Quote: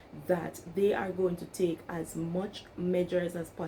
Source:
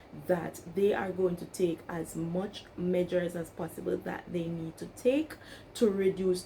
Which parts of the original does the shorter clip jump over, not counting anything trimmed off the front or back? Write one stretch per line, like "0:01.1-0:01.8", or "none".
none